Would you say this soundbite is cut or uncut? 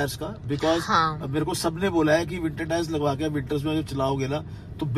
uncut